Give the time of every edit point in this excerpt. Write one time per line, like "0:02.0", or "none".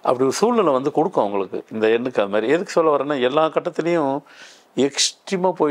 none